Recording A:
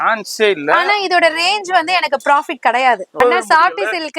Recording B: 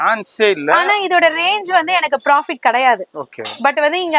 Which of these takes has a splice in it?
A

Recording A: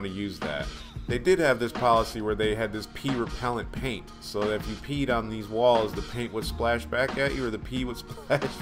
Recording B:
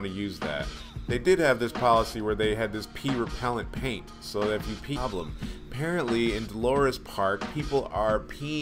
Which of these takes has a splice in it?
A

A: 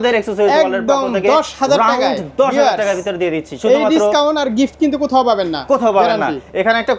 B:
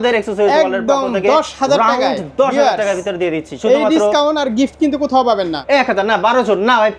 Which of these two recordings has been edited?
B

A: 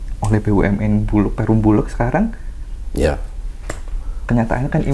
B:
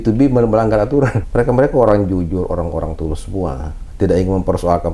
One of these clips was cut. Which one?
B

